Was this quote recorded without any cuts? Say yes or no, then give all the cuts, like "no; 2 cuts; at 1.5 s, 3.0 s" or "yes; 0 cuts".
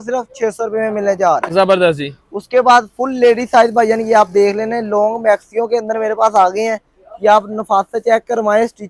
yes; 0 cuts